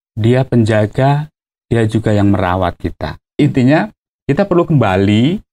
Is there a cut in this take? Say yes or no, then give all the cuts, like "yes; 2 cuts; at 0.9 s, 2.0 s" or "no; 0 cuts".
yes; 1 cut; at 3.4 s